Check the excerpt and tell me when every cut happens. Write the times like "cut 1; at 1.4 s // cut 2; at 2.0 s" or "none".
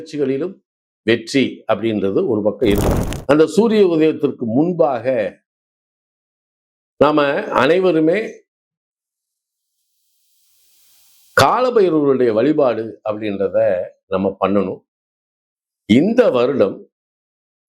cut 1; at 2.9 s